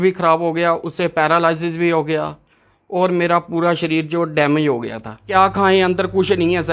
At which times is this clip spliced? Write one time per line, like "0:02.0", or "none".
0:05.1